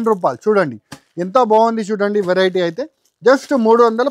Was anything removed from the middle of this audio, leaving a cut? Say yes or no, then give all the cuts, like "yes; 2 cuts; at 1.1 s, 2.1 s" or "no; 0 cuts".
no; 0 cuts